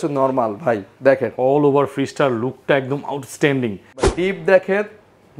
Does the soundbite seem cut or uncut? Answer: cut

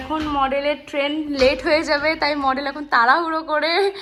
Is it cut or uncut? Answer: uncut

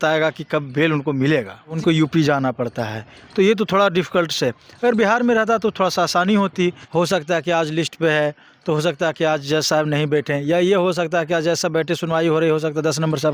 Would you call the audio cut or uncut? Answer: cut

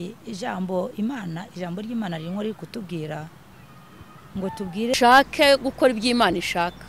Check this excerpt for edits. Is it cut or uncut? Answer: cut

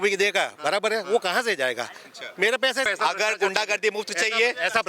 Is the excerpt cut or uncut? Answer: cut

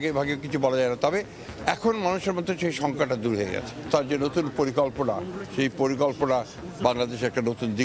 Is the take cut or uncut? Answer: cut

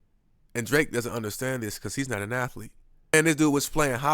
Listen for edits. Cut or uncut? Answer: cut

